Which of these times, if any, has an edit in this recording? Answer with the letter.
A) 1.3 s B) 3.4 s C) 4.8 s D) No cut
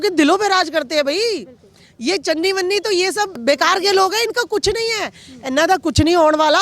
B